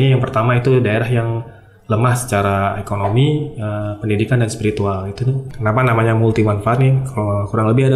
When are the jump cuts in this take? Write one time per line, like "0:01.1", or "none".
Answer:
0:05.4

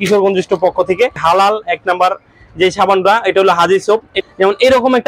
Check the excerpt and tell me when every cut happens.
0:01.2
0:04.1

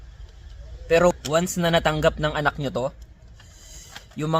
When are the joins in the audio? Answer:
0:01.1

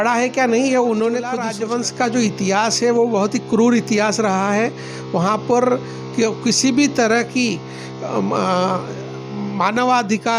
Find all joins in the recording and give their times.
0:01.4

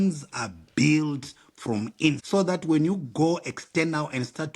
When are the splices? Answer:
0:02.2

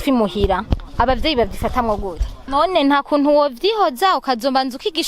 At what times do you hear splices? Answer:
0:02.4

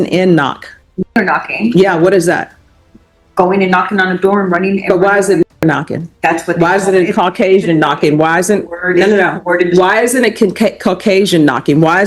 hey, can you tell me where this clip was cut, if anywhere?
0:01.2

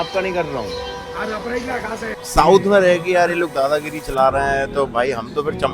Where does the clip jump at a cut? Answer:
0:02.2

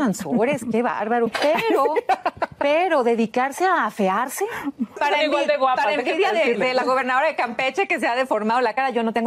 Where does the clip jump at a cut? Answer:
0:01.3
0:05.0

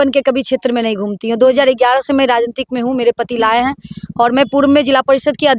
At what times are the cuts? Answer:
none

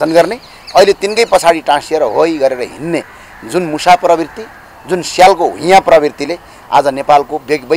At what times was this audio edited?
none

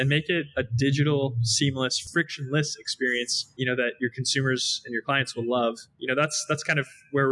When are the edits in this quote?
0:02.0
0:03.4
0:05.9

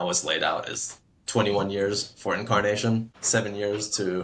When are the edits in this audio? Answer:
0:03.2

